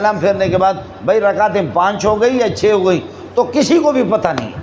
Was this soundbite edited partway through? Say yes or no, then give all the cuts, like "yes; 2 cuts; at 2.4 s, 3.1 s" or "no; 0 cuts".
no; 0 cuts